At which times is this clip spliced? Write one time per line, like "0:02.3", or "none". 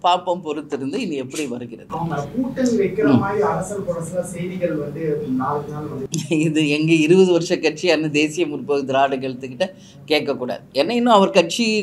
0:06.1